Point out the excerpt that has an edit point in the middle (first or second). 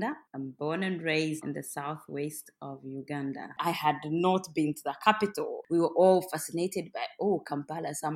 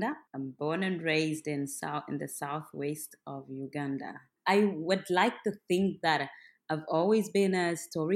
first